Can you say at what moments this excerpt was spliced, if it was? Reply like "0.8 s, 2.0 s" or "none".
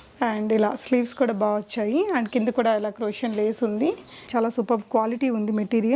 4.3 s